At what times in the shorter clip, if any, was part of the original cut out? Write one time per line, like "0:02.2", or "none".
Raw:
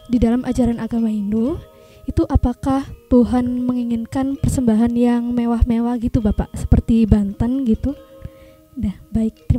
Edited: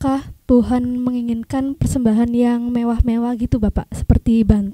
none